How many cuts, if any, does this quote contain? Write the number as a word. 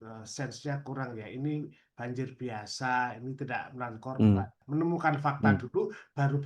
one